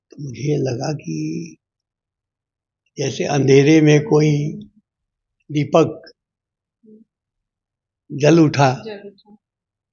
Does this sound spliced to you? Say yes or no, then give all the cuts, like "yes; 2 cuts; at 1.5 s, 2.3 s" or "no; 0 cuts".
no; 0 cuts